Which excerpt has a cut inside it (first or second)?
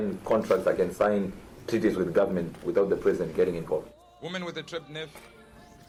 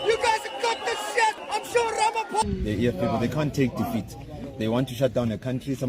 second